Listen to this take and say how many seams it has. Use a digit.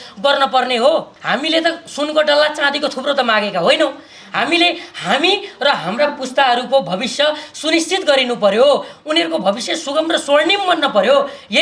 1